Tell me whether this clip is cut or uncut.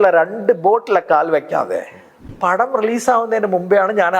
cut